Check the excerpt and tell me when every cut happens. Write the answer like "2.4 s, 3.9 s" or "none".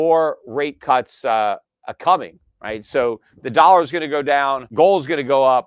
4.6 s